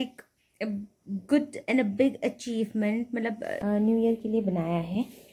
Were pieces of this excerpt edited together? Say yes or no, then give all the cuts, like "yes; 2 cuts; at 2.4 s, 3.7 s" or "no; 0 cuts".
yes; 1 cut; at 3.6 s